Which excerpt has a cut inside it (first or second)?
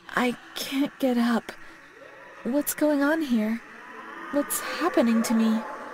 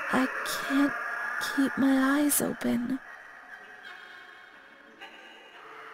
second